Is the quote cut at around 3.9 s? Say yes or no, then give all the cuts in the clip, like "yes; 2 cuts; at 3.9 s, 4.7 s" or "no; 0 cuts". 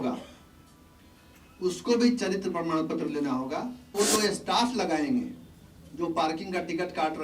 yes; 1 cut; at 3.9 s